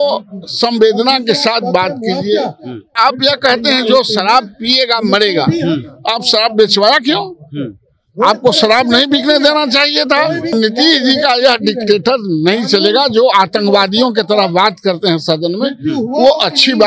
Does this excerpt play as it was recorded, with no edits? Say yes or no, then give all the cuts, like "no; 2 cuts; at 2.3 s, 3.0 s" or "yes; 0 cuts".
no; 2 cuts; at 2.9 s, 10.5 s